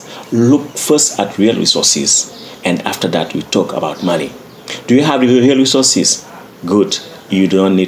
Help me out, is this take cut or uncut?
uncut